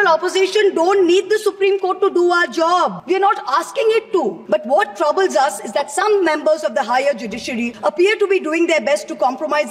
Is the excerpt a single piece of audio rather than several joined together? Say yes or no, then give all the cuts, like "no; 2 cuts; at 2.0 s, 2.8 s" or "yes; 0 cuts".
no; 3 cuts; at 3.0 s, 4.4 s, 7.7 s